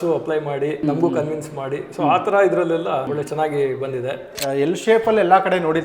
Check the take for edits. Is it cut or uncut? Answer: cut